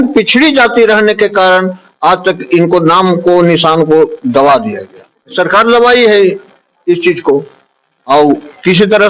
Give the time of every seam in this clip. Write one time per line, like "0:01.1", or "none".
0:05.3